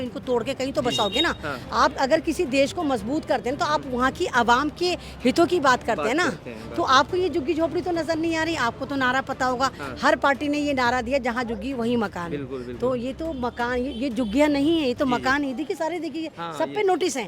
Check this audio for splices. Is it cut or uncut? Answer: uncut